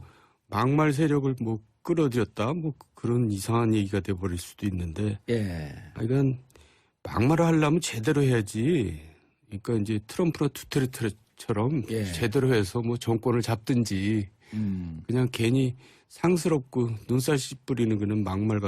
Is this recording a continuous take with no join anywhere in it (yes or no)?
no